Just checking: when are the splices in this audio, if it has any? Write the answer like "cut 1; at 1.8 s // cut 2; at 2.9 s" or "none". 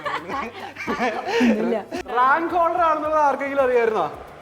cut 1; at 1.9 s